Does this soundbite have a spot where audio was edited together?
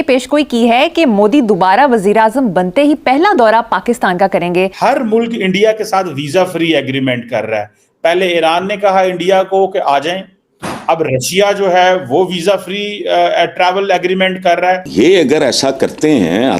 yes; 2 cuts; at 4.7 s, 14.9 s

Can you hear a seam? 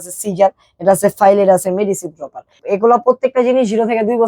yes; 1 cut; at 2.6 s

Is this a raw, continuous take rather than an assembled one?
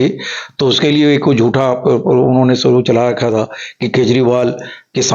yes; 0 cuts

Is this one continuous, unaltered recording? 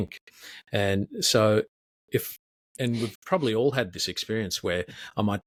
yes; 0 cuts

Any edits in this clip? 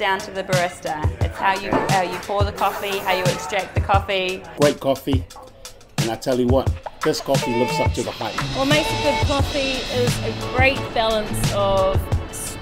yes; 2 cuts; at 4.4 s, 8.4 s

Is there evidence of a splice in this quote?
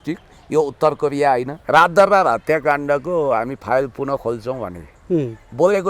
yes; 1 cut; at 1.5 s

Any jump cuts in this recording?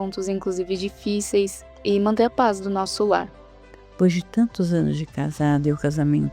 yes; 2 cuts; at 1.7 s, 3.6 s

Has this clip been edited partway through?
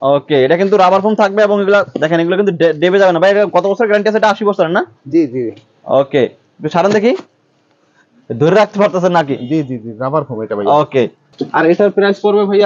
no; 0 cuts

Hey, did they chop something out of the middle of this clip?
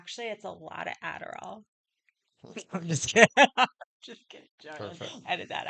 no; 0 cuts

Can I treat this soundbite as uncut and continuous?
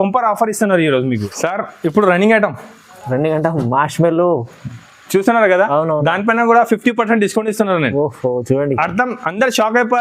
no; 1 cut; at 1.3 s

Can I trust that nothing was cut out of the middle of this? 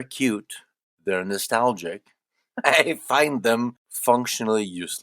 no; 1 cut; at 3.9 s

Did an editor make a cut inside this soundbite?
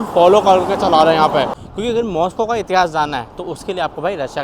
yes; 1 cut; at 1.6 s

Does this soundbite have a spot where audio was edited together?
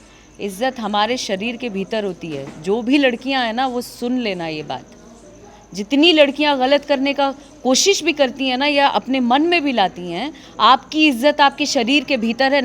no; 0 cuts

